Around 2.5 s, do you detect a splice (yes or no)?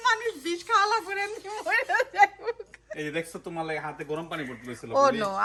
no